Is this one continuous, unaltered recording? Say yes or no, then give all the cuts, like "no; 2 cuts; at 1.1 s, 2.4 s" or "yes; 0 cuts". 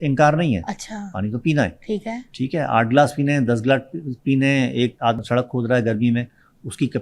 no; 1 cut; at 5.2 s